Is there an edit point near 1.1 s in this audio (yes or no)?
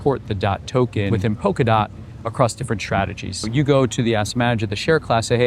yes